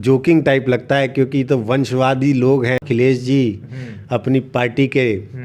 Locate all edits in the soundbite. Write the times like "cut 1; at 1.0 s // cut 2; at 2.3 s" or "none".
cut 1; at 2.8 s